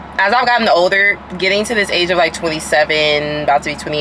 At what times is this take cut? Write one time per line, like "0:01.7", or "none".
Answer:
none